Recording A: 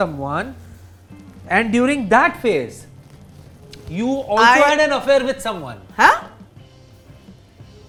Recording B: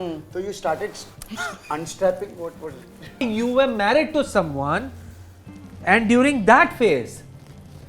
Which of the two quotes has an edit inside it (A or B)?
B